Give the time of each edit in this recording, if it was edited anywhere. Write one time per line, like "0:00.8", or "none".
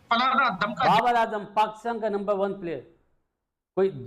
0:00.9